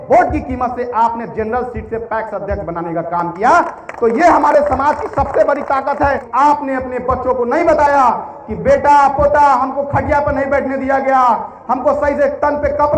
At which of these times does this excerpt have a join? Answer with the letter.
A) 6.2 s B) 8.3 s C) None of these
A